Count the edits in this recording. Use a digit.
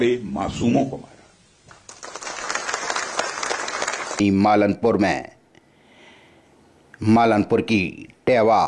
1